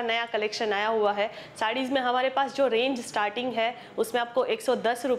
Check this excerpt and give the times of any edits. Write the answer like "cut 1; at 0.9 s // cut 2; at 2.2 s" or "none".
none